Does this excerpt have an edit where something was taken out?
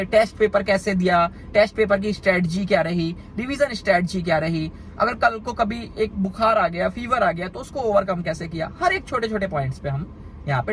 no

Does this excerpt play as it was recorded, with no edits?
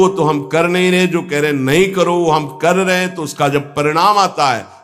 yes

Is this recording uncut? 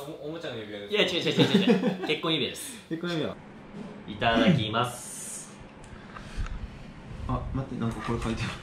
no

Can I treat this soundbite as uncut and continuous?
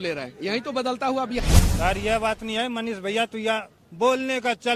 no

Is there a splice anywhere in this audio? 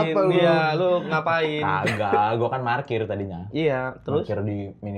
no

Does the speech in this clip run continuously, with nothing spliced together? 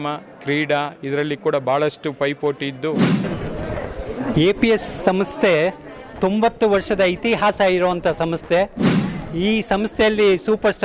no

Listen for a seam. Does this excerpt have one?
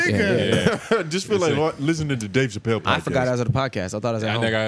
no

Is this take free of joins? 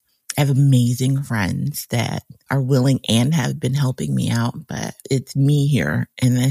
no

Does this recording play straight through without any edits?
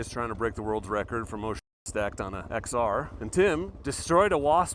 no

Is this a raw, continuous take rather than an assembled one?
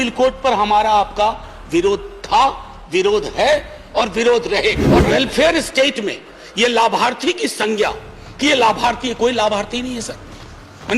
no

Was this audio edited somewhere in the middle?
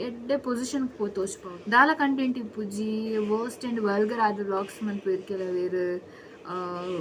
yes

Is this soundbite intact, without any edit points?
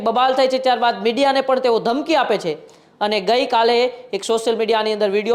yes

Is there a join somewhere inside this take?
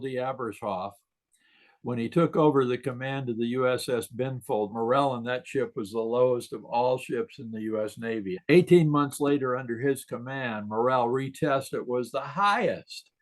yes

